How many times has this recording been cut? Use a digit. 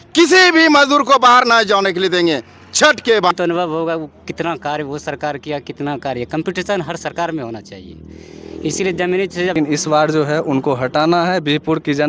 2